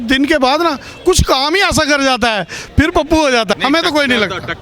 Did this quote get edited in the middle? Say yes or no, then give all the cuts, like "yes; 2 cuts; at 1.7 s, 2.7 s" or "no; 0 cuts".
yes; 1 cut; at 3.5 s